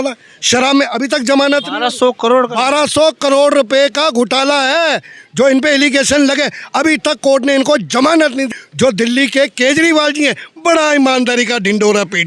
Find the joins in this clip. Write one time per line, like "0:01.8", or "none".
0:08.6